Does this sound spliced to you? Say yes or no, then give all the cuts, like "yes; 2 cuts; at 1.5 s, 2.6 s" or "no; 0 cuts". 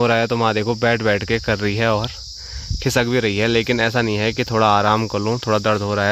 no; 0 cuts